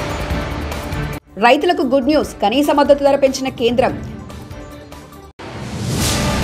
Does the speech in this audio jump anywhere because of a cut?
no; 0 cuts

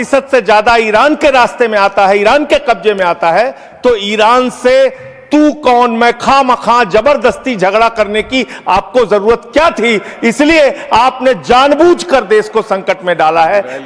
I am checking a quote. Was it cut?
no; 0 cuts

